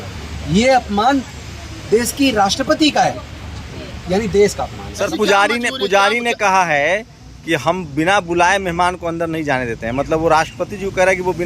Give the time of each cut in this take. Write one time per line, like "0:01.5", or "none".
0:04.8